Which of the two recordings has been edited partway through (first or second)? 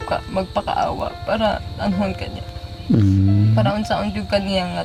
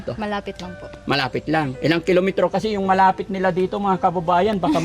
second